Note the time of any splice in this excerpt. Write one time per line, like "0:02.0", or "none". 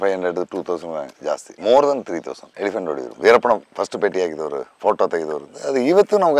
0:01.5
0:03.0